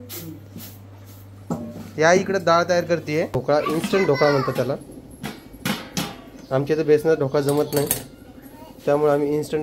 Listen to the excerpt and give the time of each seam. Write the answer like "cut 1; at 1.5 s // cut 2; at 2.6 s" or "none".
cut 1; at 3.4 s